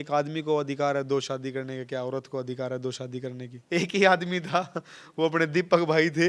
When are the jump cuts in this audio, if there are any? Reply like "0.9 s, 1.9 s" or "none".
3.6 s